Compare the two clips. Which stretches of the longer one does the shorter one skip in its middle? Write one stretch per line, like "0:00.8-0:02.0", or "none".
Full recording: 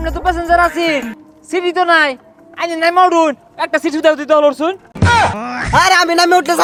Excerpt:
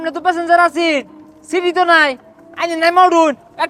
none